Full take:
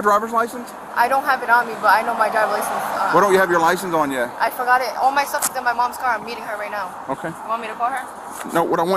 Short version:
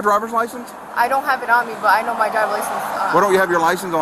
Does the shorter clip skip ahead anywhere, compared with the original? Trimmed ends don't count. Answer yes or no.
no